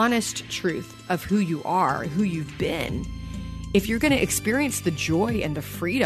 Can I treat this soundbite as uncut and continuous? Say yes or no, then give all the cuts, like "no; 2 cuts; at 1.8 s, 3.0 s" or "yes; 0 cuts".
yes; 0 cuts